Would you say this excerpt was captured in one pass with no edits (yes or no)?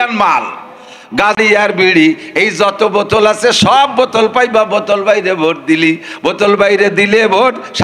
no